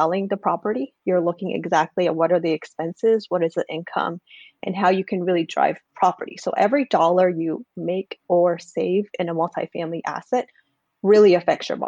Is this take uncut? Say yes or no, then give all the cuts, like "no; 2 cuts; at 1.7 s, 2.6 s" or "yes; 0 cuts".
yes; 0 cuts